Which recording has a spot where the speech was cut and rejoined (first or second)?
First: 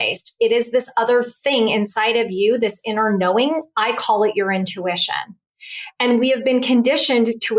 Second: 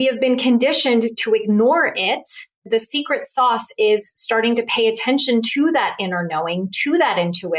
second